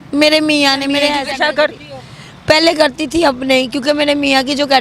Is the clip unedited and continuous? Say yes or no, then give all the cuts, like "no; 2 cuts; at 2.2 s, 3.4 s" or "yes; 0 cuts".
no; 1 cut; at 1.2 s